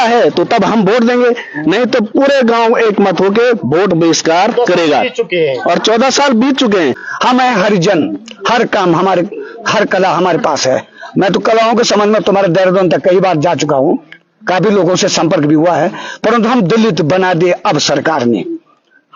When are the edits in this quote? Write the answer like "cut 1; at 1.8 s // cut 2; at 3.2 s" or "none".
cut 1; at 7.0 s